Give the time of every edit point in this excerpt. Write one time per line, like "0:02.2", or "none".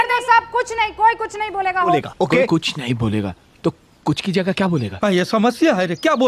none